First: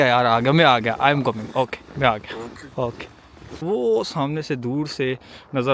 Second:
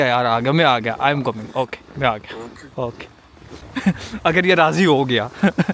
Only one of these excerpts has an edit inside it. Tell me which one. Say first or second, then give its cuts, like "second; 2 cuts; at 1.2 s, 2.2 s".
first; 1 cut; at 3.6 s